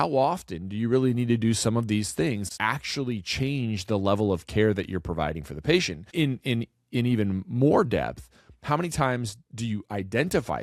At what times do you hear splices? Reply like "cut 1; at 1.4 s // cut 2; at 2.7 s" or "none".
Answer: cut 1; at 2.5 s // cut 2; at 6.1 s

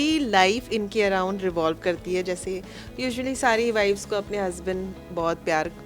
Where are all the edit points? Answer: none

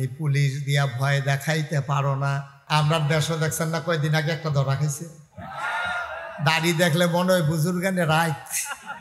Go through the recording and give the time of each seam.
cut 1; at 2.5 s

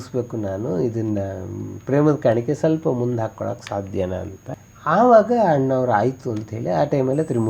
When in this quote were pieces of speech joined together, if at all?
cut 1; at 4.4 s

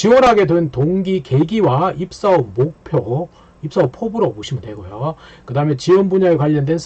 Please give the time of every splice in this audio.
none

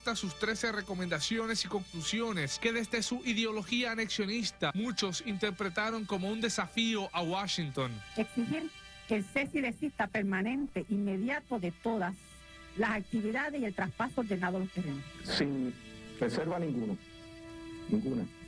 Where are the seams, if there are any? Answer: cut 1; at 14.6 s

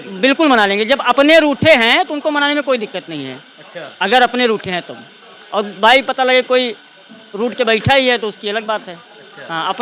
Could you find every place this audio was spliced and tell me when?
none

